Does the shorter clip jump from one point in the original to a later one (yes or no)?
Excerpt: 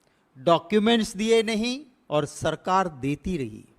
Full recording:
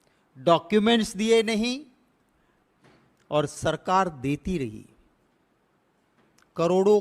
yes